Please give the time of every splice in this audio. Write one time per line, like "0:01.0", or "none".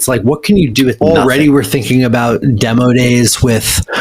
0:01.0